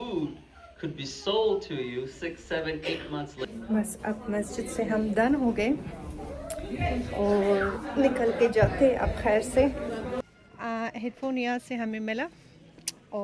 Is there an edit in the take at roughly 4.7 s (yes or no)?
no